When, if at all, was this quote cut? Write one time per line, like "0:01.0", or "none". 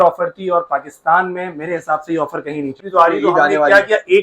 0:02.8